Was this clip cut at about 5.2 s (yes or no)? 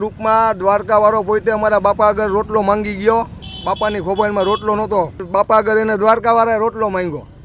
yes